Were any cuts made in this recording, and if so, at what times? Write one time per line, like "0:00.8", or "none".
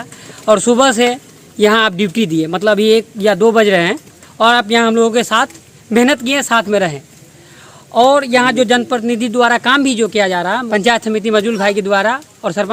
none